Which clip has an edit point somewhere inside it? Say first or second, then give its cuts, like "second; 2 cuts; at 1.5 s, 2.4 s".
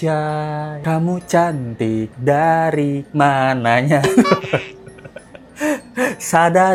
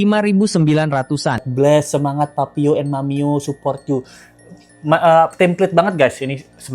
second; 1 cut; at 1.5 s